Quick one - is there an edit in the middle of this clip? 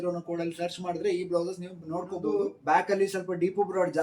yes; 1 cut; at 2.3 s

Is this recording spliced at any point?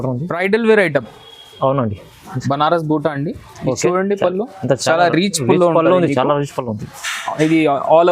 yes; 1 cut; at 2.2 s

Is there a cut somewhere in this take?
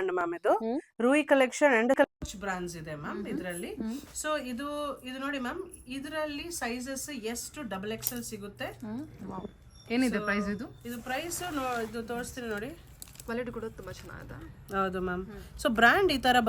no; 0 cuts

